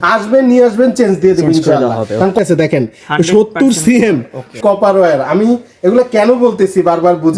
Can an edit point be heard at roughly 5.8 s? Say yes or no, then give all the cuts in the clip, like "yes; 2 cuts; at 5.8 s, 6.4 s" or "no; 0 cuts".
no; 2 cuts; at 2.4 s, 4.6 s